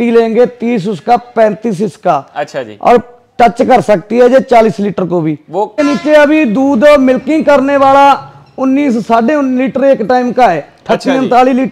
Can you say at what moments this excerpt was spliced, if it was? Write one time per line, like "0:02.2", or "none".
0:05.8